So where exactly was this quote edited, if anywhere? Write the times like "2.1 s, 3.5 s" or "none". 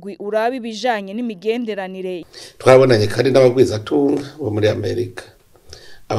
2.2 s